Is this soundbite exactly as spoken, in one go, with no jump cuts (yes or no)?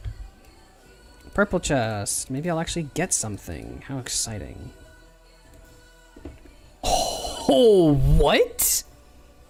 yes